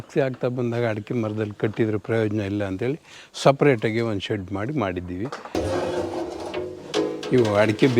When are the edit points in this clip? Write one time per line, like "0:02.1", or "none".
0:05.6